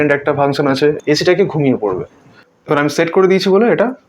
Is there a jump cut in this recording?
yes; 2 cuts; at 1.0 s, 2.2 s

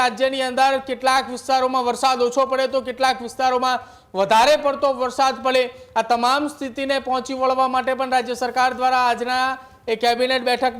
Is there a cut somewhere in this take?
no; 0 cuts

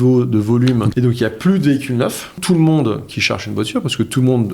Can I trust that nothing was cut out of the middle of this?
no; 2 cuts; at 0.9 s, 2.4 s

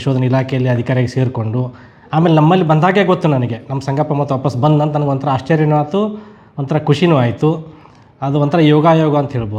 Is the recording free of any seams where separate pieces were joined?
yes; 0 cuts

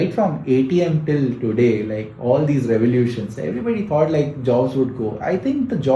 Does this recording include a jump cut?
no; 0 cuts

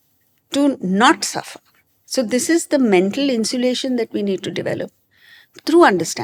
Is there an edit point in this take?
no; 0 cuts

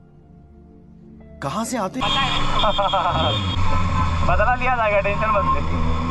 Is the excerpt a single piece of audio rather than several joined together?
no; 1 cut; at 3.6 s

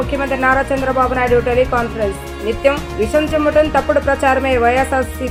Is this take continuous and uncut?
yes; 0 cuts

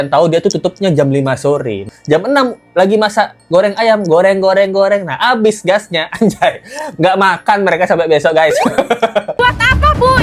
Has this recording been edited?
yes; 2 cuts; at 1.9 s, 9.4 s

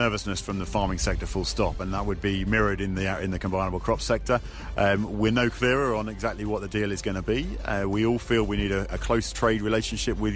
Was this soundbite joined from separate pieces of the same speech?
no; 0 cuts

